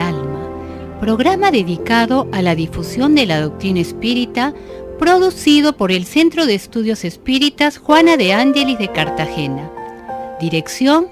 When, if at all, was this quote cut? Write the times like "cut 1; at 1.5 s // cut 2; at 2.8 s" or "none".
none